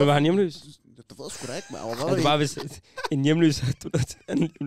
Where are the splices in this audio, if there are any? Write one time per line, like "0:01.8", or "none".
none

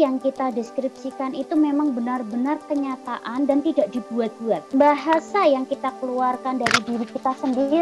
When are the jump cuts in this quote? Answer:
0:04.6

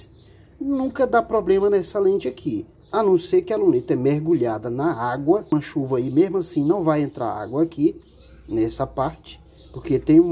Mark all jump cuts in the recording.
0:05.5

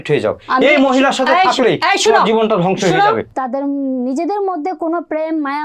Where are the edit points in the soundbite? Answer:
0:03.3

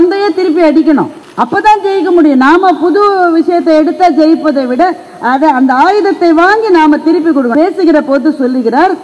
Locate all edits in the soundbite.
0:01.2
0:07.5

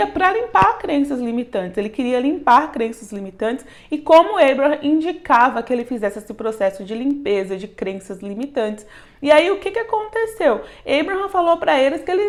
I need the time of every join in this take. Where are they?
none

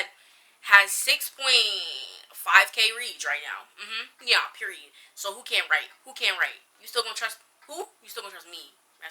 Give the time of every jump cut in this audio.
none

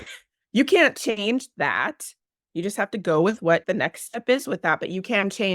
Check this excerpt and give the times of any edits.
0:03.6

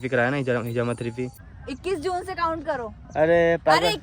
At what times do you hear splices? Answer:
0:01.4

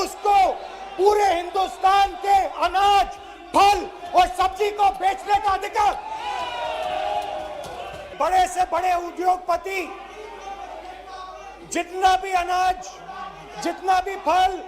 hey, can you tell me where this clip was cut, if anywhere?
0:08.1

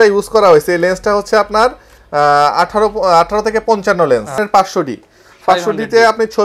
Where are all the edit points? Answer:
0:04.3

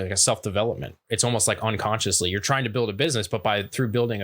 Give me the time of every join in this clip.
0:01.0

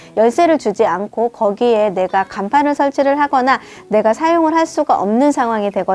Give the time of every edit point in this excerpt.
none

